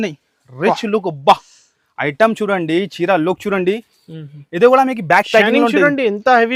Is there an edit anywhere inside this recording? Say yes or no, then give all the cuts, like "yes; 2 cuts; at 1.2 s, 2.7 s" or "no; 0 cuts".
no; 0 cuts